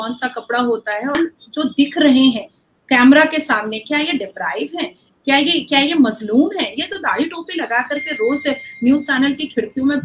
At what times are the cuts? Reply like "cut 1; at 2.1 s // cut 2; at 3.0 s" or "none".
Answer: cut 1; at 1.1 s